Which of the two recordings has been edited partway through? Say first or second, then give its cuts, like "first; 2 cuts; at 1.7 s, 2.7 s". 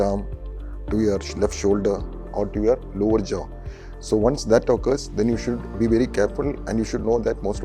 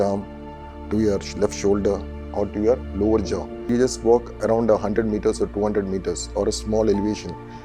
second; 1 cut; at 3.7 s